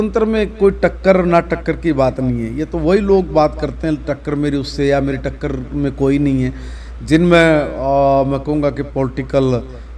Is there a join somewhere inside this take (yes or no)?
no